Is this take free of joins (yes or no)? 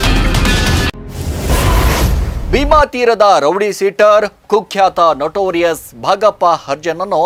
yes